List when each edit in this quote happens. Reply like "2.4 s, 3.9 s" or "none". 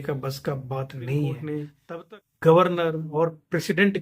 1.7 s

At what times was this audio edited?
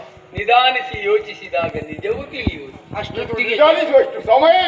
none

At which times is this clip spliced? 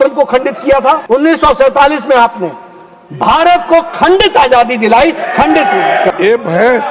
1.0 s, 6.1 s

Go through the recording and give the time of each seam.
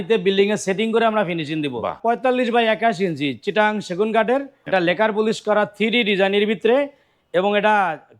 2.0 s, 4.6 s

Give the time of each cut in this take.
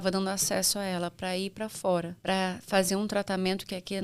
2.1 s

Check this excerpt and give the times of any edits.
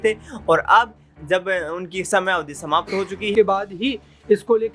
3.3 s

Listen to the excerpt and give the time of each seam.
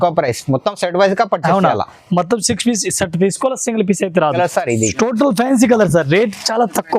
4.3 s

